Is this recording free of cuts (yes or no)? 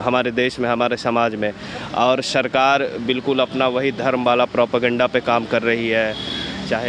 yes